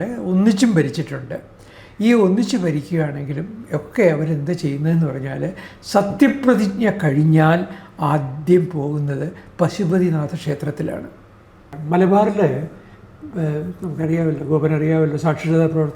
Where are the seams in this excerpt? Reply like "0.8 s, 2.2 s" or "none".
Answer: 11.7 s